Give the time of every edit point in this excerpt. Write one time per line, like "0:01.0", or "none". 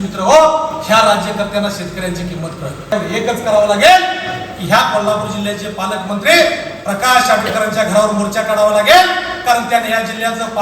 0:02.9